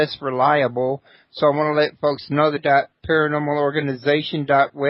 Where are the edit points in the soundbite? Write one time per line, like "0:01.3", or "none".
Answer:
none